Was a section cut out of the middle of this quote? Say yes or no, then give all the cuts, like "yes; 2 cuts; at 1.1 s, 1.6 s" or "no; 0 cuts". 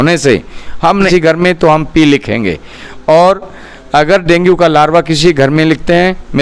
yes; 1 cut; at 1.1 s